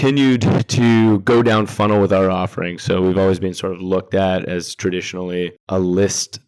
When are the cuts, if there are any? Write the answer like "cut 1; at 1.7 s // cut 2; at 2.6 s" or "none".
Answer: cut 1; at 5.6 s